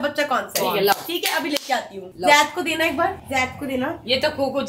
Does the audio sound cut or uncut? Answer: uncut